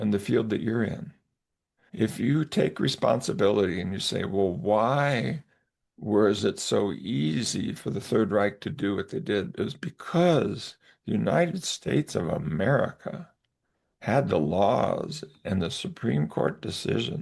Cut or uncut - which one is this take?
uncut